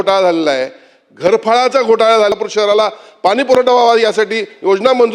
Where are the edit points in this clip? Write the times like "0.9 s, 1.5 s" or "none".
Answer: 2.3 s